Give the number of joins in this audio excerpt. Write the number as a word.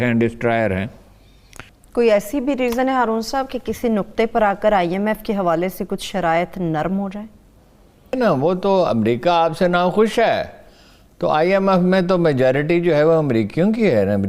two